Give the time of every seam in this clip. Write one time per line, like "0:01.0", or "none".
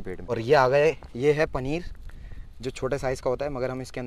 none